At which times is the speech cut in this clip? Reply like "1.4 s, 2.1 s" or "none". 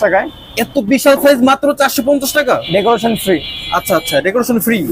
none